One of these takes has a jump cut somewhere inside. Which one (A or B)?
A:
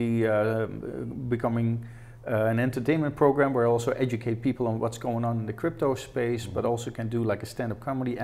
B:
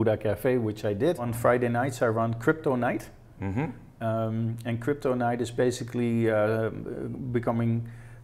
B